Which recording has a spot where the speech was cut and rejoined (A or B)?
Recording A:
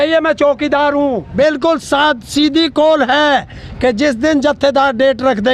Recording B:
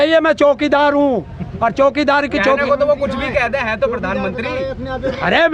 A